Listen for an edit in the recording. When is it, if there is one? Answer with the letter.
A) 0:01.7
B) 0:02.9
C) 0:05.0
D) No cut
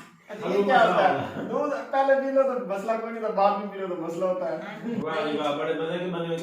C